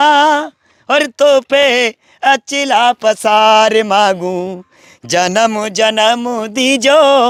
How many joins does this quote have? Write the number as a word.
zero